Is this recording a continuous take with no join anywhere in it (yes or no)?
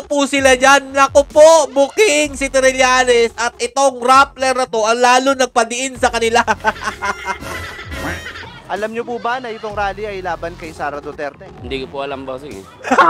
yes